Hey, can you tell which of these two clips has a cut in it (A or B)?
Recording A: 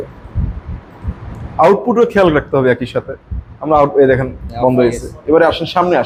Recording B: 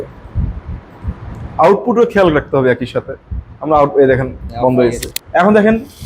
B